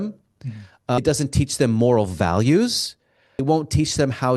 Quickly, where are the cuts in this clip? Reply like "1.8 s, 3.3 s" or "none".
1.0 s, 3.3 s